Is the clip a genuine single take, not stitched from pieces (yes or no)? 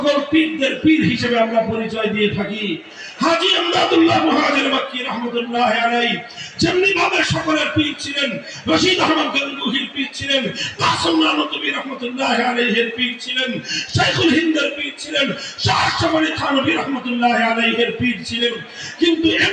yes